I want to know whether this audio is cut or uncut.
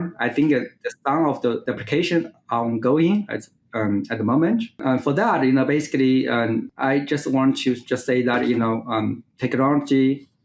cut